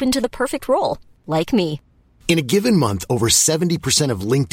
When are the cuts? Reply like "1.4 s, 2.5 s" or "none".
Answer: none

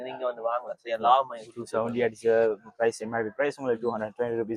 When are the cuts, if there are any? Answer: none

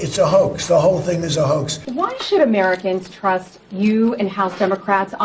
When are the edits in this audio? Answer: 1.8 s

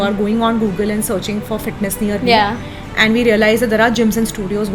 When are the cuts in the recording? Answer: none

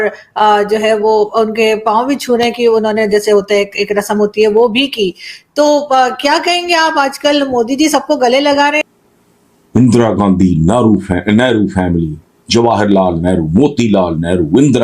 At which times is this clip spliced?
8.8 s

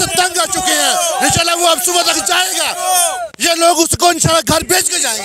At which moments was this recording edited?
none

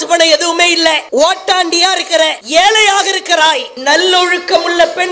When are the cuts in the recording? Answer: 1.0 s, 2.4 s, 3.7 s

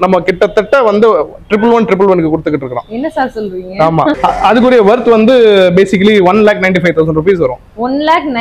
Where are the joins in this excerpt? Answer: 4.2 s

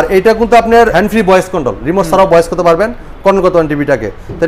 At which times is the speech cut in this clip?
0.9 s

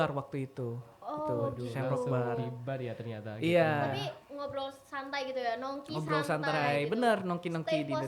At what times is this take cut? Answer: none

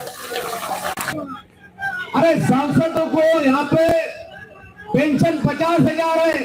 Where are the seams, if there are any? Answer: 1.1 s

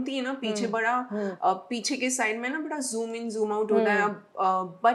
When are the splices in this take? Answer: none

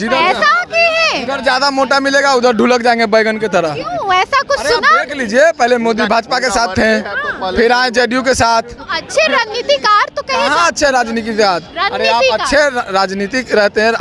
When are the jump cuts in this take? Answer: none

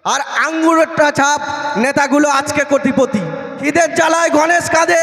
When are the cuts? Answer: 3.7 s

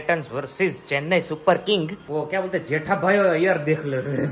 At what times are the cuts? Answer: 2.0 s

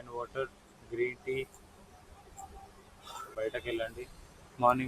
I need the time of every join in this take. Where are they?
3.3 s

